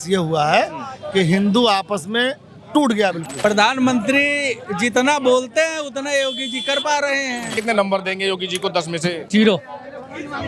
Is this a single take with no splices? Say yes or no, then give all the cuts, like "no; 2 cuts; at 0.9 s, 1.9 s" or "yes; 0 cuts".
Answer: no; 3 cuts; at 3.4 s, 7.6 s, 9.2 s